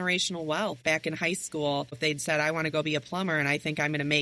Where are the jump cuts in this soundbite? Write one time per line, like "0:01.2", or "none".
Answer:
0:00.8
0:02.0